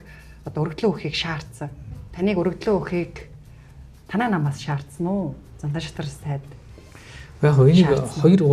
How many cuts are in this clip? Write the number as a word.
one